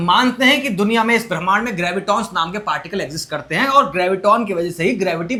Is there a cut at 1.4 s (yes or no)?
no